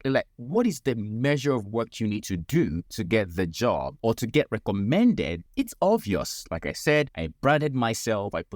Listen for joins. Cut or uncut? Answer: cut